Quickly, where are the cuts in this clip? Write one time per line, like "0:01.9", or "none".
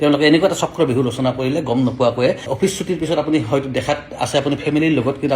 0:02.4